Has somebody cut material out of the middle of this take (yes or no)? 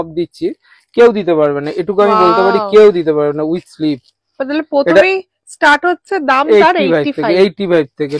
no